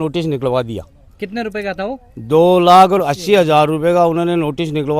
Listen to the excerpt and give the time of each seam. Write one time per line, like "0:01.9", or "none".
none